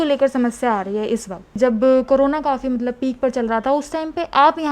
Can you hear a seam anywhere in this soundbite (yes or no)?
yes